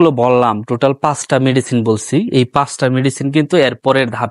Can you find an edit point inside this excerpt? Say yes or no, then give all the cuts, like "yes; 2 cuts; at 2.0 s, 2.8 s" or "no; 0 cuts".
no; 0 cuts